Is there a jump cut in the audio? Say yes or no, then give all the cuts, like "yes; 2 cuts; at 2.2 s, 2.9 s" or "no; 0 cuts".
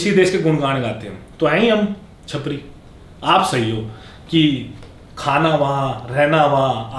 no; 0 cuts